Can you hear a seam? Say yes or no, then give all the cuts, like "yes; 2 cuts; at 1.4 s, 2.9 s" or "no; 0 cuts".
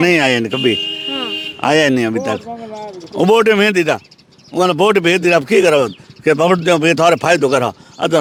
no; 0 cuts